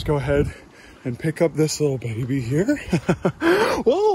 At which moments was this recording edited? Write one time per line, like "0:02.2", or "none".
none